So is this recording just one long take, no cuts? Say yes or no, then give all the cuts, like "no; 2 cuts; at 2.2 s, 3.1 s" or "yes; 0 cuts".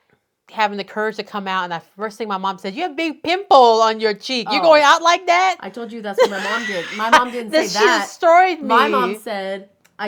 yes; 0 cuts